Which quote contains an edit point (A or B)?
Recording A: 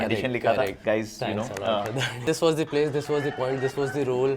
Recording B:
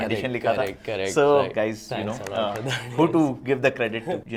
A